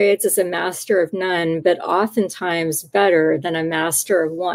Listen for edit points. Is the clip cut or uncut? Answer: uncut